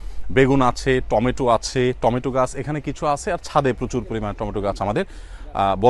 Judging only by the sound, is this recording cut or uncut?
uncut